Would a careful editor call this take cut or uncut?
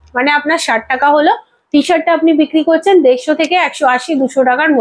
uncut